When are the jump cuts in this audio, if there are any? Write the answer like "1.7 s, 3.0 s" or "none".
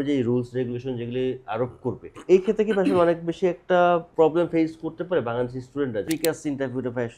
2.1 s, 4.1 s, 6.0 s